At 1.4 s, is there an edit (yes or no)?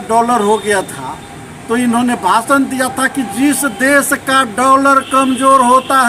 no